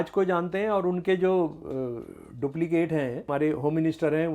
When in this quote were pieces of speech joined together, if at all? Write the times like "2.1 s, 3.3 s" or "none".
3.3 s